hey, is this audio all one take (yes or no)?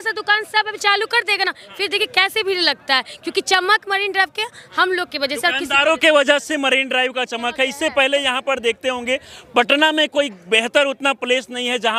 yes